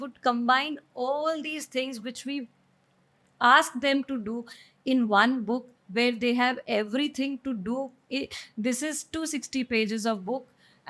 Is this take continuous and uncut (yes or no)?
yes